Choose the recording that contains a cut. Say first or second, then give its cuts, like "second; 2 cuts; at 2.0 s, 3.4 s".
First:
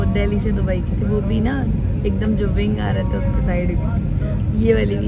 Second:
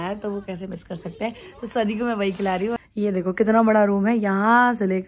second; 1 cut; at 2.8 s